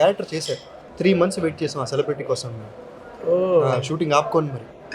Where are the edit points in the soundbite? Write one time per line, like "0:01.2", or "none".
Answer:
0:00.9